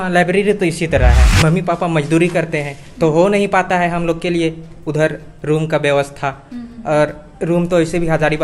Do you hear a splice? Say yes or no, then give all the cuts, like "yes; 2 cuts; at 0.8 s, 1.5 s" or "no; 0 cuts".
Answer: yes; 1 cut; at 1.3 s